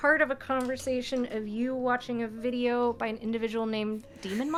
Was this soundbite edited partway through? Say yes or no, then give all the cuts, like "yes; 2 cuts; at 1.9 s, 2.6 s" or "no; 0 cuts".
no; 0 cuts